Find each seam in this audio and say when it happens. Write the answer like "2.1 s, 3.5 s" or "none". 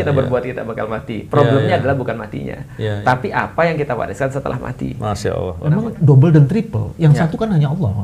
5.6 s